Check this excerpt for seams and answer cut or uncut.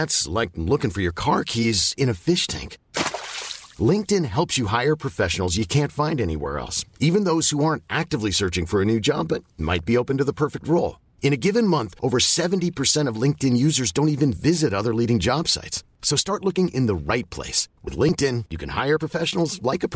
uncut